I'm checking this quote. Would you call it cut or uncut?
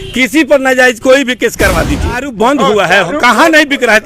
cut